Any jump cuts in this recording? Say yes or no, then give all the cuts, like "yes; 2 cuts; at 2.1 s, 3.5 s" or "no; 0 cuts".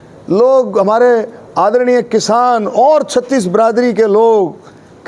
no; 0 cuts